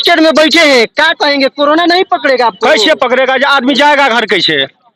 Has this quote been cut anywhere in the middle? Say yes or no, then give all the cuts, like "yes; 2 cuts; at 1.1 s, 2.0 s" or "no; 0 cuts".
no; 0 cuts